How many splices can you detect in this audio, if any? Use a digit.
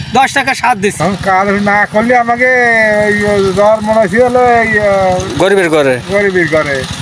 1